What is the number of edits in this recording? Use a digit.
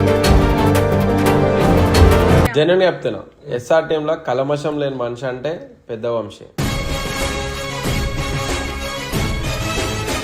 1